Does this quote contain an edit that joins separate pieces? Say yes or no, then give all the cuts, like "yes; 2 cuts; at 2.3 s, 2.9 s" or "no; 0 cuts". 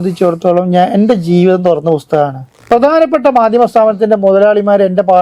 yes; 1 cut; at 2.5 s